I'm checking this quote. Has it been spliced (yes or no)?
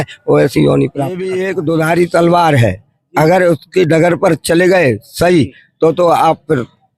yes